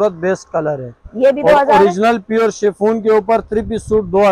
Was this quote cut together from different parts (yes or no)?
no